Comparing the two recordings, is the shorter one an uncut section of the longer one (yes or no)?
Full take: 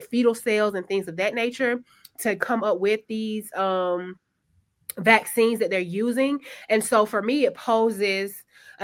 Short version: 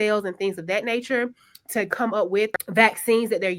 no